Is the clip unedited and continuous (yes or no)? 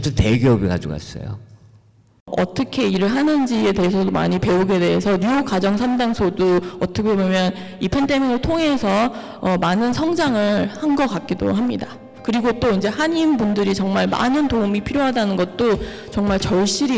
no